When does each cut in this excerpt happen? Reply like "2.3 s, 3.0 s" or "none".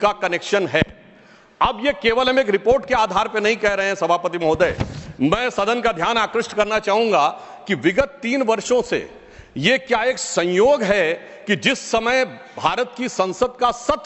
none